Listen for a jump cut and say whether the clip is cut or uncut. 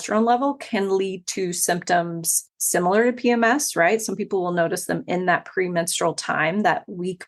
cut